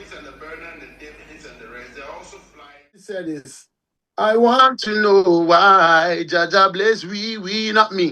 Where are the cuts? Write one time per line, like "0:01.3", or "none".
0:03.0